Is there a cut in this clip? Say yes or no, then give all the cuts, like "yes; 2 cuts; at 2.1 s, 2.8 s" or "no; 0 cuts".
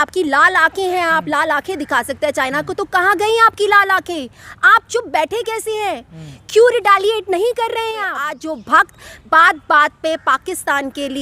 yes; 1 cut; at 8.4 s